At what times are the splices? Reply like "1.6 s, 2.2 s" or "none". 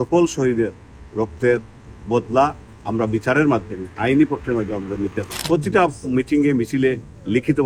5.3 s